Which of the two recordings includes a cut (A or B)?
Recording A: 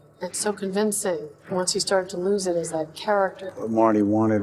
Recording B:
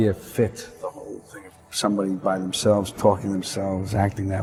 A